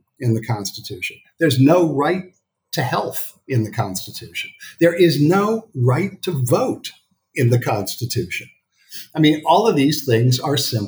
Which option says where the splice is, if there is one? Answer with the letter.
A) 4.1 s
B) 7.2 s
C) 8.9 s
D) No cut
D